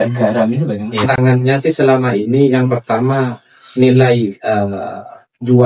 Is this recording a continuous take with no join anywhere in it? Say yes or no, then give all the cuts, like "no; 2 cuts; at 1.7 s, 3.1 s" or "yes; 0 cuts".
no; 1 cut; at 0.9 s